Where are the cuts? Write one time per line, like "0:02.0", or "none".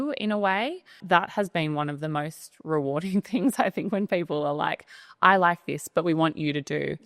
0:01.0